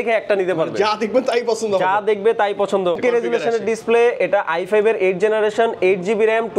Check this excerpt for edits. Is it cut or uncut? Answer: cut